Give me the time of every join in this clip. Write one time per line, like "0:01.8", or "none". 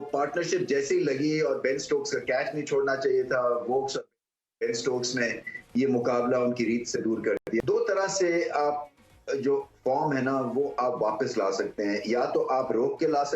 0:07.6